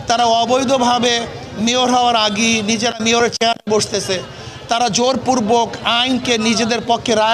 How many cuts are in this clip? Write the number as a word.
zero